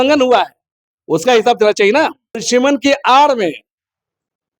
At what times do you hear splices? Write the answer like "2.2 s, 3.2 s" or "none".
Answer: 2.4 s